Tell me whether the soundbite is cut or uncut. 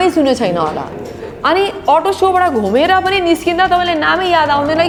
uncut